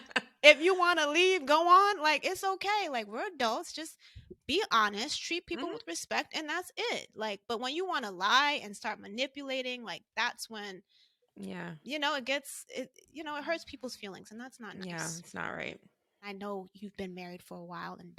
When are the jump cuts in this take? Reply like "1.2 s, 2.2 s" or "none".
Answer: none